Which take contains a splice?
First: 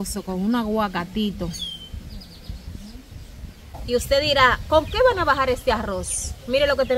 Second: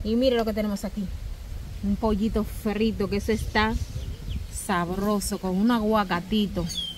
first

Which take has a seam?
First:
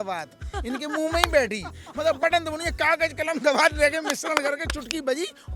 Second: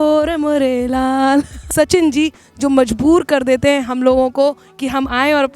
second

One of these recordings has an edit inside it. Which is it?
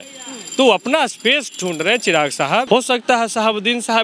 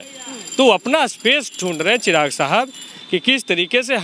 first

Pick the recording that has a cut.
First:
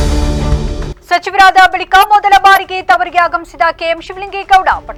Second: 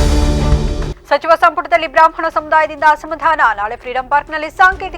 second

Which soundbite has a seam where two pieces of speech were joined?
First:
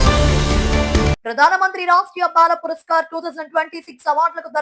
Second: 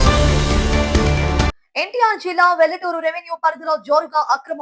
second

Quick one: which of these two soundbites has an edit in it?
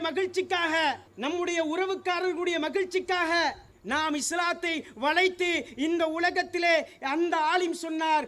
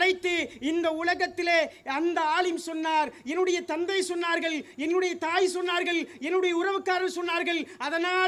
first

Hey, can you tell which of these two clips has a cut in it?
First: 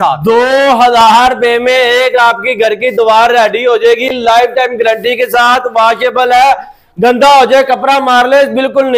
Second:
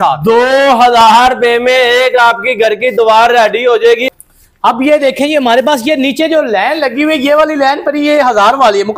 second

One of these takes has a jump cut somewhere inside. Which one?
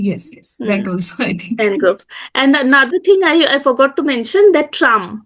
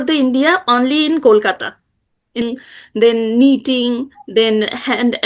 second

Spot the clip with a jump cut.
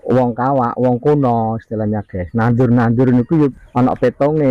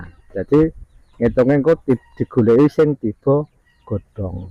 first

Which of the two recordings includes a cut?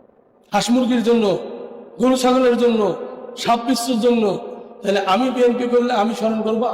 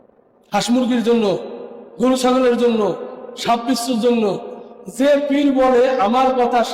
first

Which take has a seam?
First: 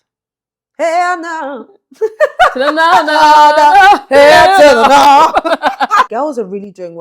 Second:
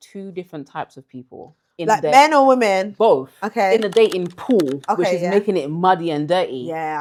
first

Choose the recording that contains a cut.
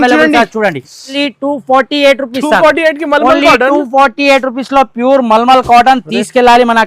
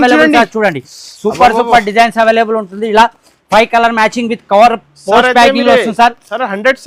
first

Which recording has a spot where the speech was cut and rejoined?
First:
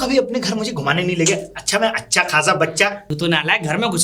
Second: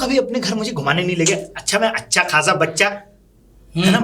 first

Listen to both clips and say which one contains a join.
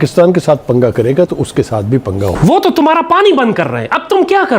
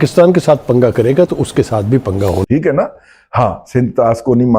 first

